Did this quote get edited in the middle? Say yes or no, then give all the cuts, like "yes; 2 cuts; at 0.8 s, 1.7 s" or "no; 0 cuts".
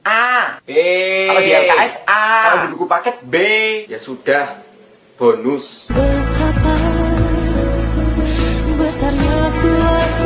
yes; 1 cut; at 1.9 s